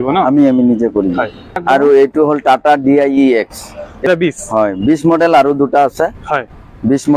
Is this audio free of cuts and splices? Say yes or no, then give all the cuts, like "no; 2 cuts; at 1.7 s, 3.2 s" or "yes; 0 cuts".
no; 2 cuts; at 1.6 s, 4.0 s